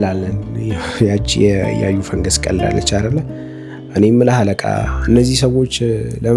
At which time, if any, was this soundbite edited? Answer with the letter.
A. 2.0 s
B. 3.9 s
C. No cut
C